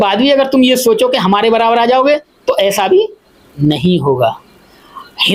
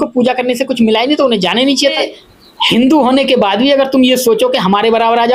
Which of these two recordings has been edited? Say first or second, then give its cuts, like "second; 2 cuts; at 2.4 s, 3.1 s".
second; 1 cut; at 2.0 s